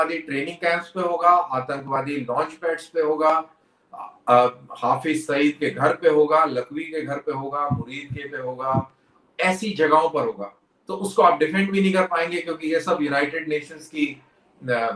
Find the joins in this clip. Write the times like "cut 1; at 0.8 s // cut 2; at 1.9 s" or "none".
none